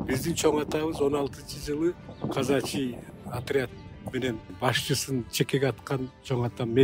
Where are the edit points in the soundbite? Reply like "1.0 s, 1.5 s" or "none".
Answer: 2.1 s, 3.1 s, 4.5 s